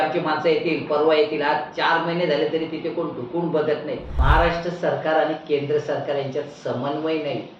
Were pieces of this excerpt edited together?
yes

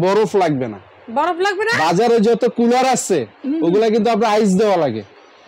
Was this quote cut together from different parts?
no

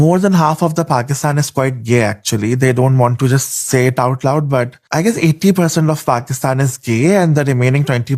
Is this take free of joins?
yes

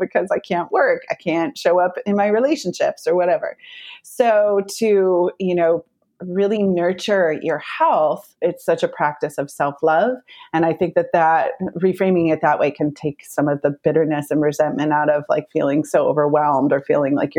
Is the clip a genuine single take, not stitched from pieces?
no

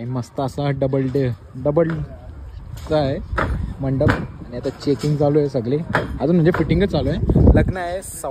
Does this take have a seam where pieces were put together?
no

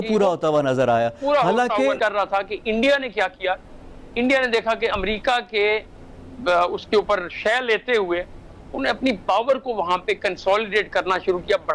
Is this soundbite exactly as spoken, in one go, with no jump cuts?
no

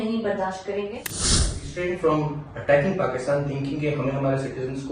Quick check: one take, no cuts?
no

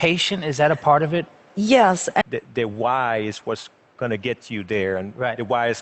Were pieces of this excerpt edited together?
yes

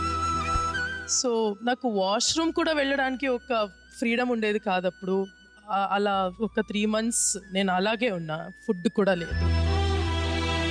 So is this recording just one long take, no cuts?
yes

